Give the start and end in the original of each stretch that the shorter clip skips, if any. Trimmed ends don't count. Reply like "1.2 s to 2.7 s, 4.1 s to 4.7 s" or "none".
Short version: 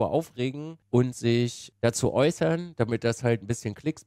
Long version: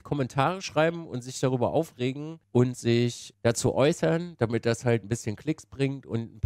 none